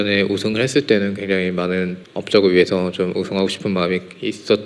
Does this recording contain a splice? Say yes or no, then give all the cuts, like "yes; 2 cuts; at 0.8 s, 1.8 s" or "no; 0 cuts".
yes; 1 cut; at 2.0 s